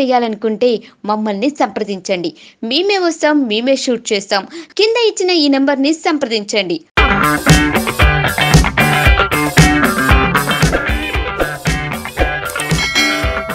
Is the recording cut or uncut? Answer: uncut